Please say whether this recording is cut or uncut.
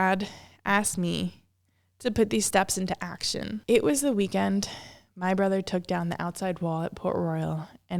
cut